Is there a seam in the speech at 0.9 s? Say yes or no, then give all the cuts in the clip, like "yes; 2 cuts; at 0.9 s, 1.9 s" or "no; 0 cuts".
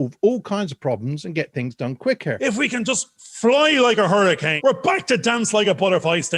no; 2 cuts; at 2.4 s, 4.5 s